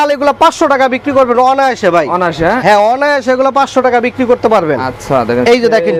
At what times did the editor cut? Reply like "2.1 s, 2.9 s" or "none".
none